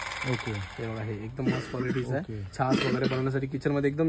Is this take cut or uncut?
uncut